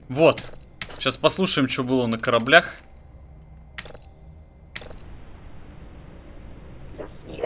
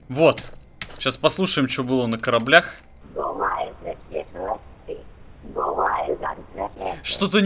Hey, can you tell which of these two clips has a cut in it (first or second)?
second